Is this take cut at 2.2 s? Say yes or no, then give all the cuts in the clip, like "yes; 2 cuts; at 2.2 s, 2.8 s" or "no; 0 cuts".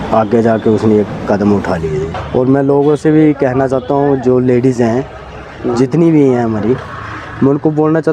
yes; 1 cut; at 2.2 s